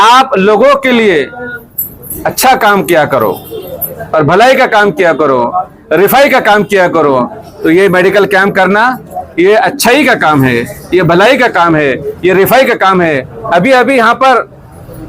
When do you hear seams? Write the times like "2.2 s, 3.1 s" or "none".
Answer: 13.3 s

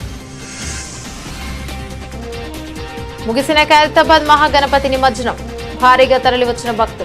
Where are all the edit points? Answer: 1.4 s

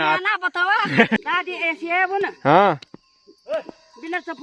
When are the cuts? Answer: 1.2 s

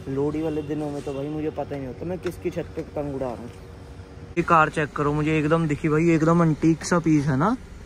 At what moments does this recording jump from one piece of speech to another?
4.2 s

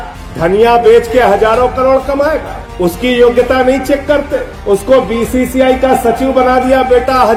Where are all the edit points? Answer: none

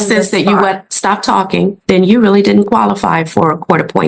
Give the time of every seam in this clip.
1.8 s

